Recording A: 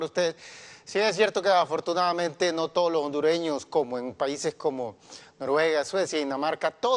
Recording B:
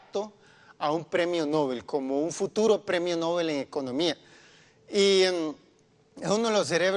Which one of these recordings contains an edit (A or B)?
A